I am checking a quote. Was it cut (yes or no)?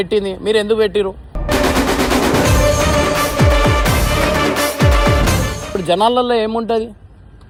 no